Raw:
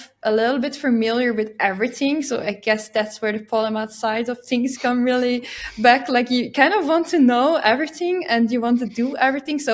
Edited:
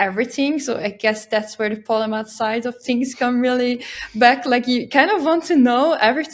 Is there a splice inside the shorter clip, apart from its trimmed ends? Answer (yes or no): no